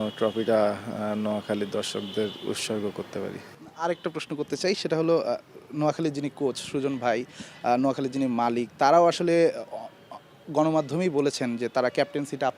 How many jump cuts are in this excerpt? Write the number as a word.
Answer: zero